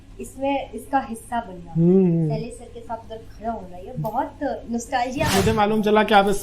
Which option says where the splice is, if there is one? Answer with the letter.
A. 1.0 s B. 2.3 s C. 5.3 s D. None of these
C